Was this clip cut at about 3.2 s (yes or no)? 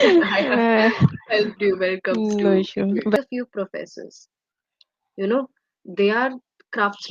yes